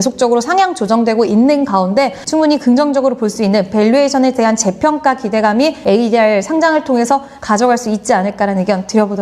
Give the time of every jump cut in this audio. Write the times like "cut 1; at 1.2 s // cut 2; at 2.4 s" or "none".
none